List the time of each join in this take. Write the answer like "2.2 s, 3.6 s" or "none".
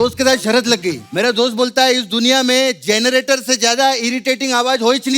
1.0 s